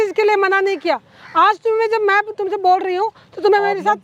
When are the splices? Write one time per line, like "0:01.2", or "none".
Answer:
none

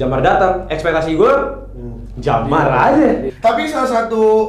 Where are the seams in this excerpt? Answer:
0:03.3

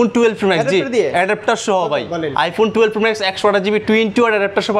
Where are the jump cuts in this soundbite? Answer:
none

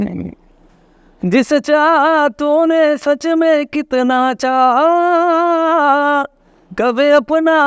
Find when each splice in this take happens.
none

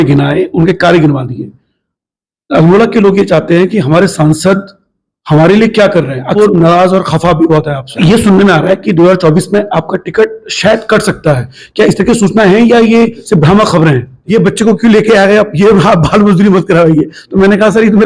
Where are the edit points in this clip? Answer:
0:06.4
0:08.0
0:14.2

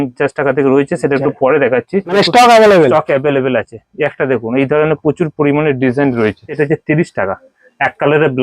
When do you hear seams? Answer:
0:02.1
0:06.6

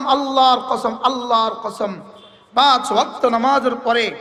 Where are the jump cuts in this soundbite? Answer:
none

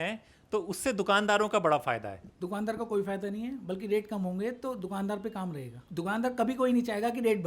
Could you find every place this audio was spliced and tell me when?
0:02.2
0:05.8

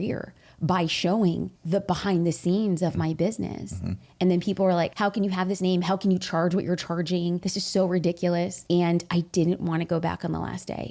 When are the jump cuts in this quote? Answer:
0:07.4

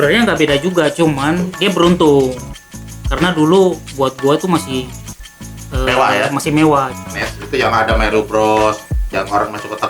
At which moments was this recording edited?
0:06.9

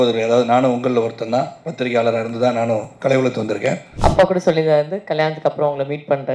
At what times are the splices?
0:03.9

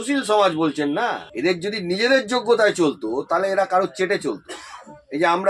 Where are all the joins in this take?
0:01.3

